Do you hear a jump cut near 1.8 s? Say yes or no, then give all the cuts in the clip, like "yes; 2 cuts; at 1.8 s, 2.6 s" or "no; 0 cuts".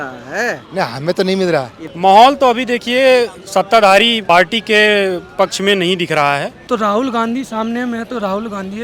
yes; 3 cuts; at 1.8 s, 4.2 s, 6.5 s